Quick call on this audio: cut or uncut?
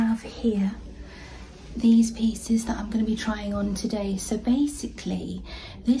uncut